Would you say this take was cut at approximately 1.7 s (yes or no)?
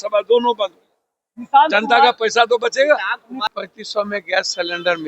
no